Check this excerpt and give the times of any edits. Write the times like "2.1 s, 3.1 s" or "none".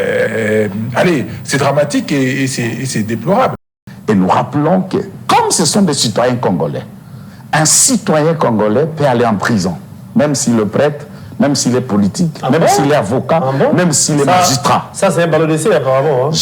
3.7 s